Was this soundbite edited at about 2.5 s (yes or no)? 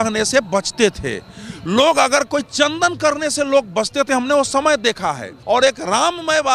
no